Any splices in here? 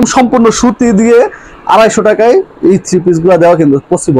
no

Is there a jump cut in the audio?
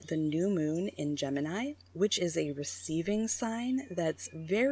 no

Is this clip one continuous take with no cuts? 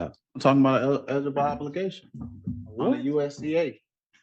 yes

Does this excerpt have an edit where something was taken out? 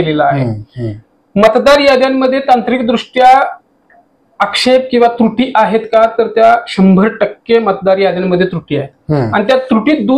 no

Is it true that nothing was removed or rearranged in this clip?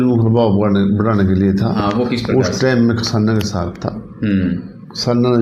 yes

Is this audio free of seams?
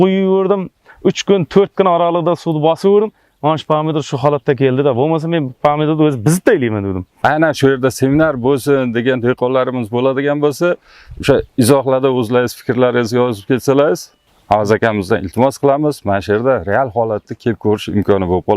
no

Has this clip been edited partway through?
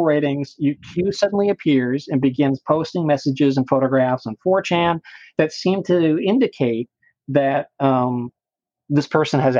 no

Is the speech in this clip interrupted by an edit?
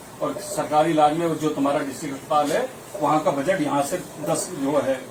no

